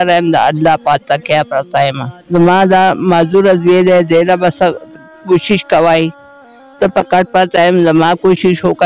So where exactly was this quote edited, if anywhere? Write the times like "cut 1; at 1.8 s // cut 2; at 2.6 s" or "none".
cut 1; at 2.1 s